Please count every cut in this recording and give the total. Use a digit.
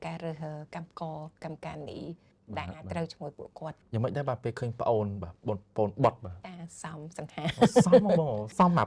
0